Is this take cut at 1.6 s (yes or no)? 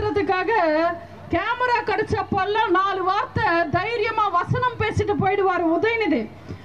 no